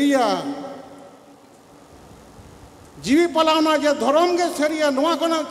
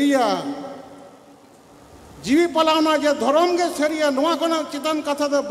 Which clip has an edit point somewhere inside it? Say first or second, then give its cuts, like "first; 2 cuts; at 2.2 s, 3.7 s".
second; 1 cut; at 2.1 s